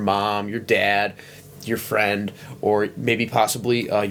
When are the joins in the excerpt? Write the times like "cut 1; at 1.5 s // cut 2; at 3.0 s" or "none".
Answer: none